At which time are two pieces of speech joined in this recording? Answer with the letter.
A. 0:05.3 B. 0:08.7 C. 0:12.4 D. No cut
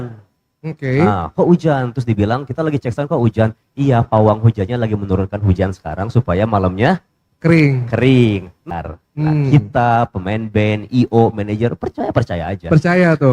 B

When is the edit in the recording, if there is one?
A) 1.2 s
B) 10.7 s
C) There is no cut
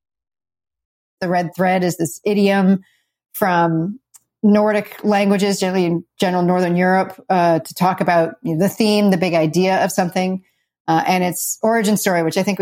A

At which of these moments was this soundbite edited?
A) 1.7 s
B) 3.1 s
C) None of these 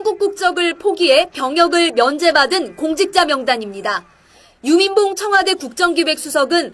A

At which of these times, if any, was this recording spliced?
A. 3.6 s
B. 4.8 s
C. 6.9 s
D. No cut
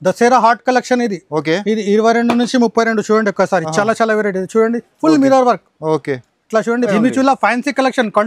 C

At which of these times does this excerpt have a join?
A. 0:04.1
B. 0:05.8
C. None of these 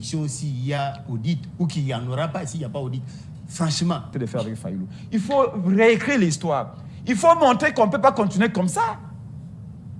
A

